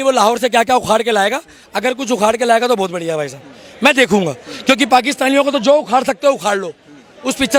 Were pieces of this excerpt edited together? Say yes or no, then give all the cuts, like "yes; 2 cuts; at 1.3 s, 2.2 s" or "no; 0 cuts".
no; 0 cuts